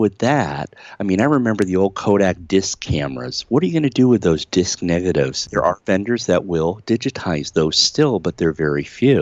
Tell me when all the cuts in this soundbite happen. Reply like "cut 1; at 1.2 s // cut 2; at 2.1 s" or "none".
cut 1; at 5.4 s